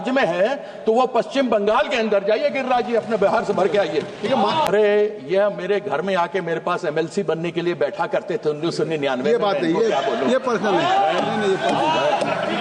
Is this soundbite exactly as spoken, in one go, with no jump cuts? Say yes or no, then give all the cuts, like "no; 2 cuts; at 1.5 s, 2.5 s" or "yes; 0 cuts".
no; 1 cut; at 4.7 s